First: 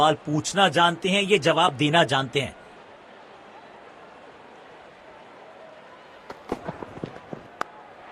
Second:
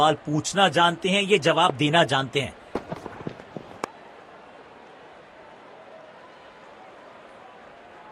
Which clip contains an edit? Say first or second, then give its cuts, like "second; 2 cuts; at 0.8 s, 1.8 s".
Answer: second; 2 cuts; at 2.6 s, 3.7 s